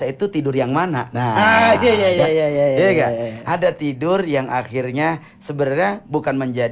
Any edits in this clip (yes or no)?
no